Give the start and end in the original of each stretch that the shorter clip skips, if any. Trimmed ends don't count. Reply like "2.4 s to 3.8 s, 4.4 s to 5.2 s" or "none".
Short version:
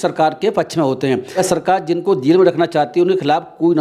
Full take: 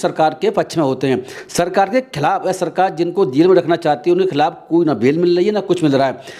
1.3 s to 2.4 s